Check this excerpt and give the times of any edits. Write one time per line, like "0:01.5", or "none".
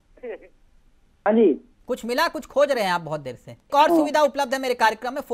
0:01.3
0:03.7